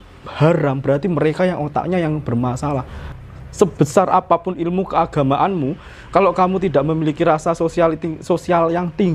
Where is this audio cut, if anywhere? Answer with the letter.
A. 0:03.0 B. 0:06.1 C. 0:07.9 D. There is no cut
A